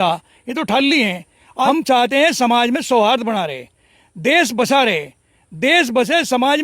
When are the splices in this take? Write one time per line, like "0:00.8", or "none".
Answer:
0:01.7